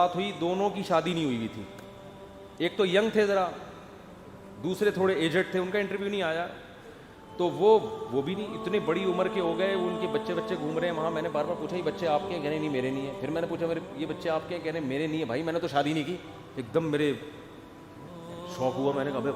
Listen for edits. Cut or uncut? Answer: uncut